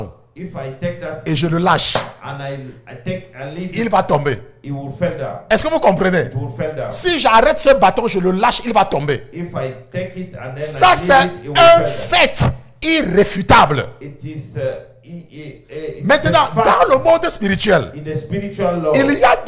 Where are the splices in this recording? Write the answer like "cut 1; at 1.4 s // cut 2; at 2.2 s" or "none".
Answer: none